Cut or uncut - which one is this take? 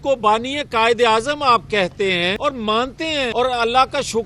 cut